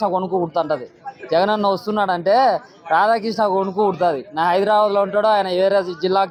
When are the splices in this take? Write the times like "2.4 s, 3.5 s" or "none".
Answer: none